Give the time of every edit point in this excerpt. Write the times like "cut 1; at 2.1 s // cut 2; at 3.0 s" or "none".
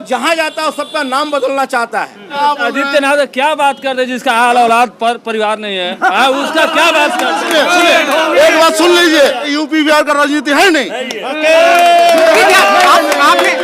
cut 1; at 2.3 s // cut 2; at 9.5 s